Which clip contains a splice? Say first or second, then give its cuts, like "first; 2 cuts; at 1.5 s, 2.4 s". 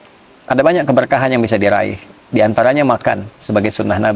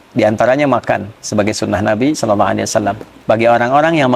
second; 1 cut; at 3.1 s